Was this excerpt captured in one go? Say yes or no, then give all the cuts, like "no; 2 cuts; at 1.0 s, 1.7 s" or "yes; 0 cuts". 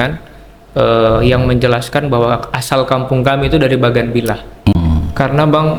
no; 1 cut; at 4.7 s